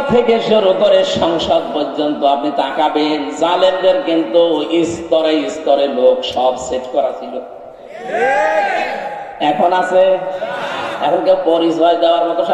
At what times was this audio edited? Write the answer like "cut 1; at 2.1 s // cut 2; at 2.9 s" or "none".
none